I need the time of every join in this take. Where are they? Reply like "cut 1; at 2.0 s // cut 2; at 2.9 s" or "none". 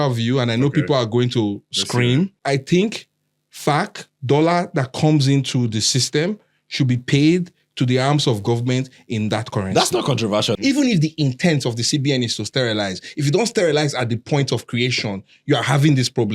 cut 1; at 2.4 s // cut 2; at 10.6 s